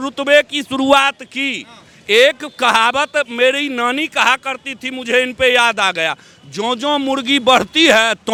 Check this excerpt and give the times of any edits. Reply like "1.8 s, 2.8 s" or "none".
none